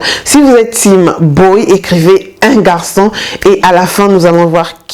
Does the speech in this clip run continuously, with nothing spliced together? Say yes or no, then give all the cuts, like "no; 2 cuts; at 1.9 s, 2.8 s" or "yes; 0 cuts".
yes; 0 cuts